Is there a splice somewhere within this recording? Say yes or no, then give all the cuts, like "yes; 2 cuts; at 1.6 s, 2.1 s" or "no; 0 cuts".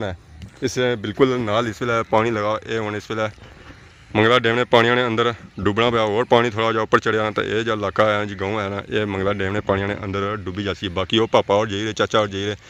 no; 0 cuts